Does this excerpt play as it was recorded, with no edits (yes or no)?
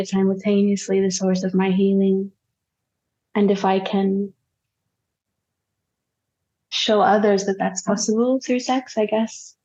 yes